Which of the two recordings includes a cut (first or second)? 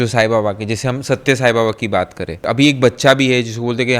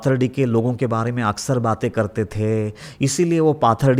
first